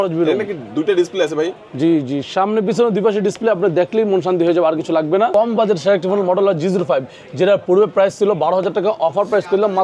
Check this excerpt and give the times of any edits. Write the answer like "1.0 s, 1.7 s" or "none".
5.3 s

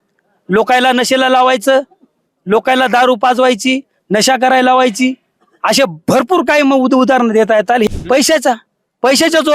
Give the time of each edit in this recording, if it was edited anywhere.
7.9 s

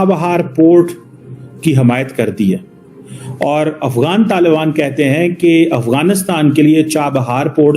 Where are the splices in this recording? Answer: none

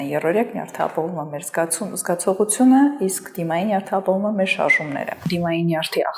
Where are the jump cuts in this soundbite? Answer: 5.1 s

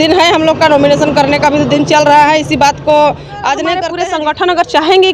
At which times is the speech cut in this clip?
3.9 s

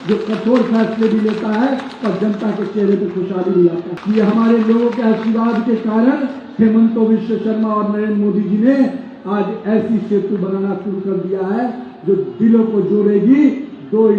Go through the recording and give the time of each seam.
3.9 s

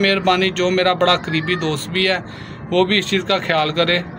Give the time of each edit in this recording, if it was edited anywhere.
none

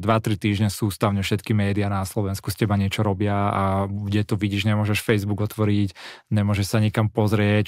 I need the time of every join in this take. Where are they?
none

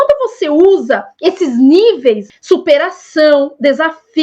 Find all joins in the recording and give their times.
2.3 s

